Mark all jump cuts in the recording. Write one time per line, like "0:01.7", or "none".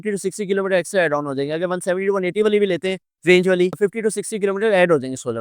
none

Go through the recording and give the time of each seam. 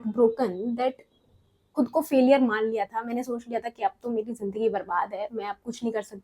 0:01.7

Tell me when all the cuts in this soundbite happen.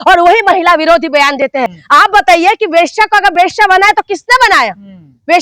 0:01.7

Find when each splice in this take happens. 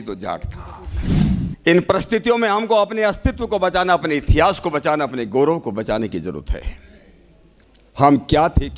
0:01.2

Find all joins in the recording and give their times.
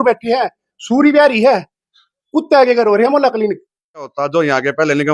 0:04.2

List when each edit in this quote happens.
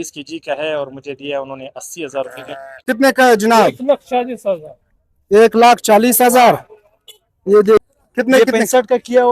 0:02.8
0:07.8

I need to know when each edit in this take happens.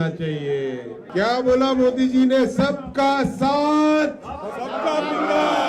0:01.0

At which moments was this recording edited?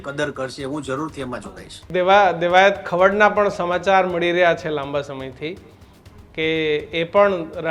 0:01.8

